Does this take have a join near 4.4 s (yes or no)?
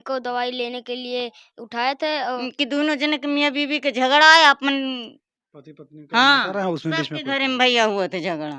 no